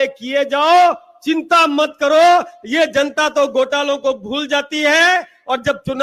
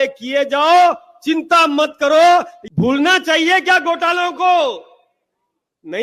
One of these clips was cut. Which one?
second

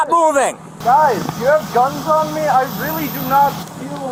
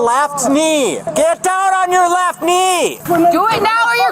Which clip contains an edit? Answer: second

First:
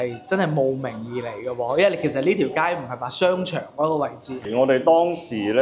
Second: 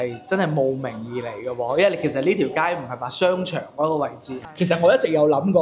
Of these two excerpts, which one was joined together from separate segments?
second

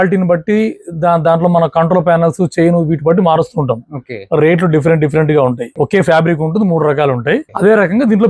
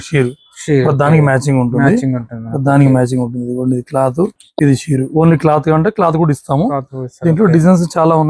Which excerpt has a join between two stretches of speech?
first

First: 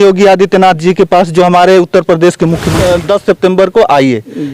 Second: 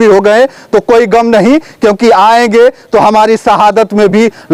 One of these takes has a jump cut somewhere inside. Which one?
first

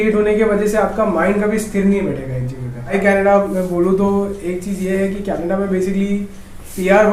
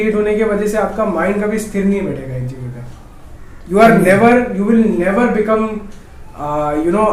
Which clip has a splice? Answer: first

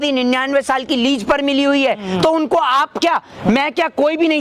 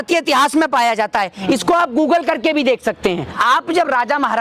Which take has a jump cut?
second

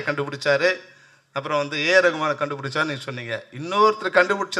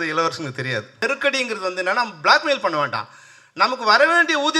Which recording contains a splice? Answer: second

